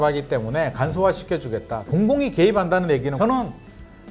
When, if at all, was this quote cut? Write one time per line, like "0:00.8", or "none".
0:01.8
0:03.1